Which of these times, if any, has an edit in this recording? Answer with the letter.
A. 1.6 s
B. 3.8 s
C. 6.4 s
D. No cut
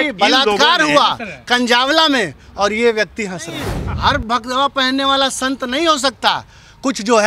B